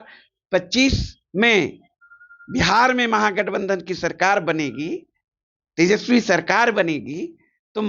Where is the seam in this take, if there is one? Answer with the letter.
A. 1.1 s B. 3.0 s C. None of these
A